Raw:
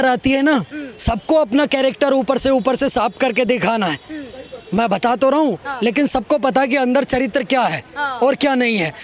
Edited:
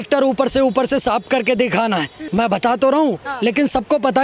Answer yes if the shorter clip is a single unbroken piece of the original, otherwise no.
no